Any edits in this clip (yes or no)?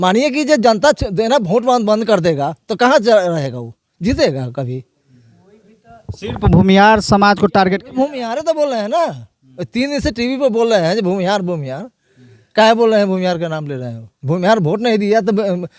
no